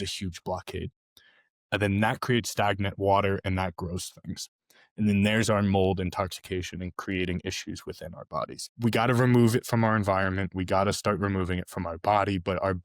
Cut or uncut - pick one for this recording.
cut